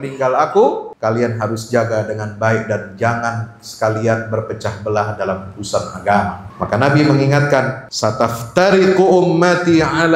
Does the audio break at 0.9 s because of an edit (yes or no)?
yes